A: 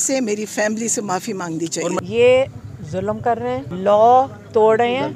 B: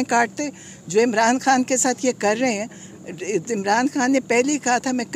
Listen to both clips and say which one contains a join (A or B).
A